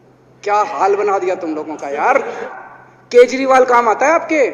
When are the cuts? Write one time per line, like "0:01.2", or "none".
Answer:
0:02.4